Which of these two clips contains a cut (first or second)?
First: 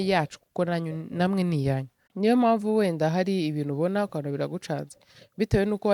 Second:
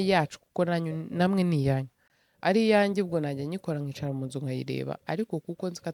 first